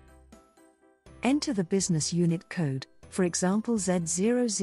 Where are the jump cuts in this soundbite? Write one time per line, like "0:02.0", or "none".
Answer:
0:01.2